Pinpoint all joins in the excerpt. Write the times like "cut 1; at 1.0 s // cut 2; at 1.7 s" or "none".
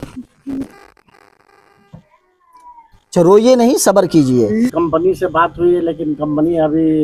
cut 1; at 4.7 s